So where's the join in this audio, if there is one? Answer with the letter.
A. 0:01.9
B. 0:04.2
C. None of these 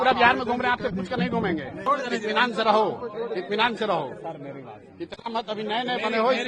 A